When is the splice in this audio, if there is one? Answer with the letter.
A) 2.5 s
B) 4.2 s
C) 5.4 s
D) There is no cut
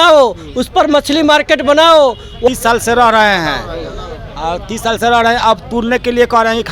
A